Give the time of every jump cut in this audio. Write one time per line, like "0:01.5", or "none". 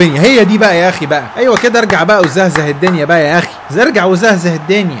none